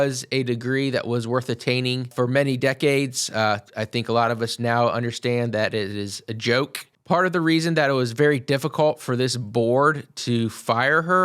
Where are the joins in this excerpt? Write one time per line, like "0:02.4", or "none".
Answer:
0:02.1
0:07.0